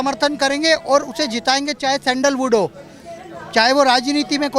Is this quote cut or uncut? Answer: uncut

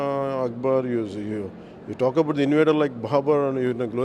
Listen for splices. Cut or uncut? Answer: uncut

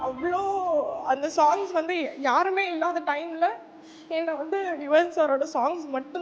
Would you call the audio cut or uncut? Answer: uncut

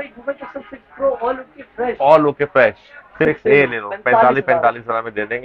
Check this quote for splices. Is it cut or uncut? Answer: cut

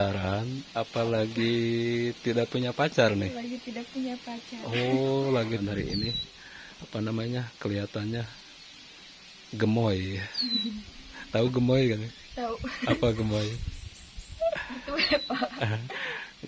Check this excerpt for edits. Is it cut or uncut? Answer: cut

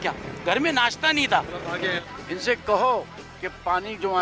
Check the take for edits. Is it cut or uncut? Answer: cut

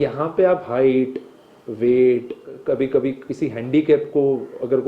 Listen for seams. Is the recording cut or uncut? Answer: cut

